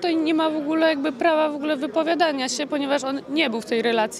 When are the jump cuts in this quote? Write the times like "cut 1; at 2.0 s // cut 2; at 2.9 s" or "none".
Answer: none